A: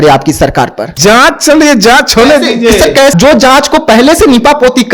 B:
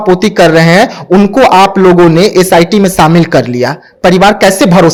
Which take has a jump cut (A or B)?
A